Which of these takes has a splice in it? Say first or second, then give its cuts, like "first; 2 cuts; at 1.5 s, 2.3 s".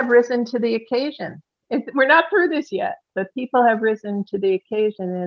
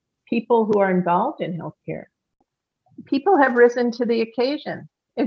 second; 1 cut; at 2.5 s